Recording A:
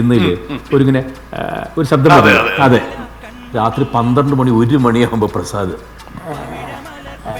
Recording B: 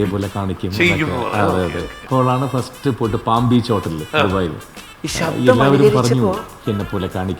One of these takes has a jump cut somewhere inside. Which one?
B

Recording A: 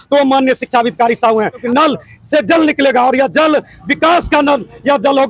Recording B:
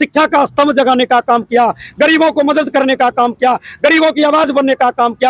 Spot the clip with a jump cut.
A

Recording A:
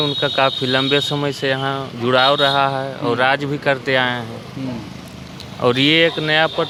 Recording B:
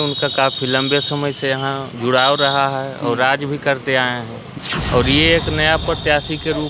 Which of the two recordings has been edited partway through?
B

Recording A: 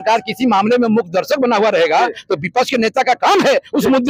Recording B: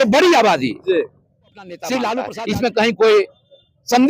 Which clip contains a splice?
B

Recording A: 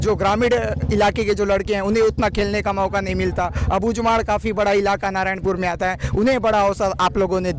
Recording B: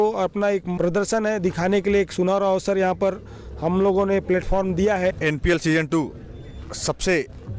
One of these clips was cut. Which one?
B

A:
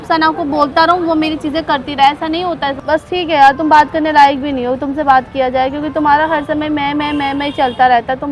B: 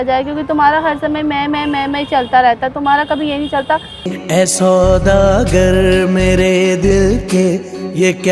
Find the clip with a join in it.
A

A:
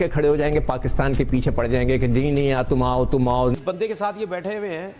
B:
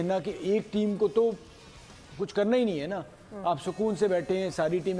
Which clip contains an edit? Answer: A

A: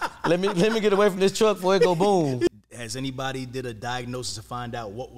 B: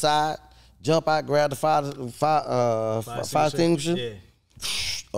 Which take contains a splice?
A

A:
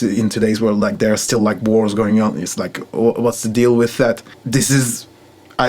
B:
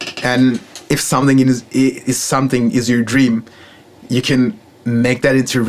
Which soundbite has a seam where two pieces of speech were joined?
A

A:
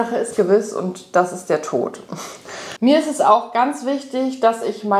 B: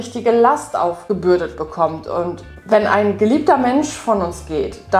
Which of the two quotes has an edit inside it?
A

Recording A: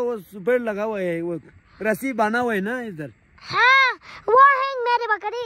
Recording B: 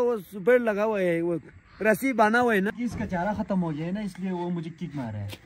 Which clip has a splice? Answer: B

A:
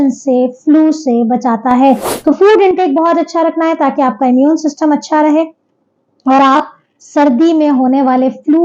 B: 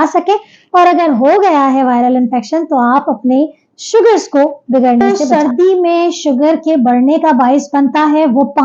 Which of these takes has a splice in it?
B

